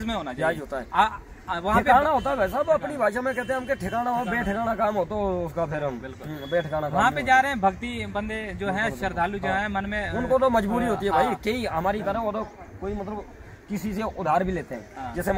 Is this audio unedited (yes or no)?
yes